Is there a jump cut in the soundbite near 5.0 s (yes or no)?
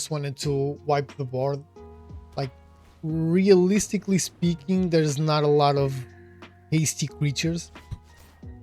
no